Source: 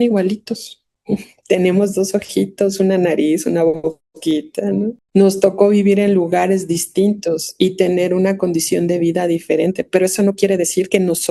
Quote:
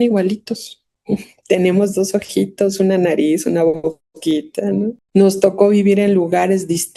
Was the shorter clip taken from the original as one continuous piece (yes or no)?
yes